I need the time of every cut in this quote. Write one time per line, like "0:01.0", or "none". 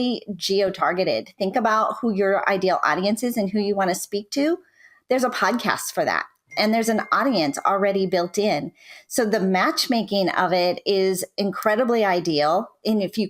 none